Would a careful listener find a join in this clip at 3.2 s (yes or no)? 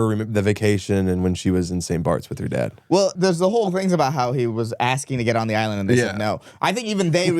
yes